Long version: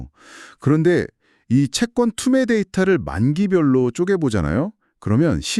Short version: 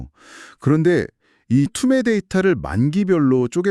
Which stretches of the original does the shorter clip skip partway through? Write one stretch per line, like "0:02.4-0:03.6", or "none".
0:01.7-0:02.2